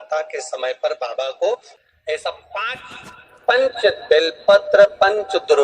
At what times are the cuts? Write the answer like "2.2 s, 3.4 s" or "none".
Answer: 1.8 s